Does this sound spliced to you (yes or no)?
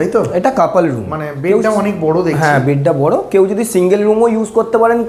no